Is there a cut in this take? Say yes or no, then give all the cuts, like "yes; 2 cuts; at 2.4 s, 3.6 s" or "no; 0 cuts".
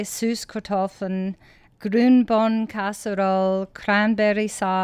yes; 1 cut; at 1.7 s